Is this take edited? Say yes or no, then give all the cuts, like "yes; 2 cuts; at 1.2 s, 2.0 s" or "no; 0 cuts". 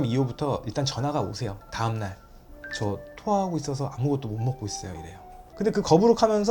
yes; 1 cut; at 5.5 s